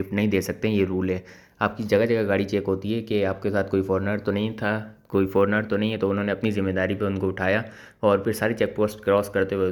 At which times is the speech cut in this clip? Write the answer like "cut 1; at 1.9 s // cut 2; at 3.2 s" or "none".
none